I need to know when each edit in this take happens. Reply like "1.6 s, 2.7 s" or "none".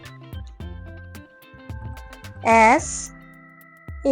2.4 s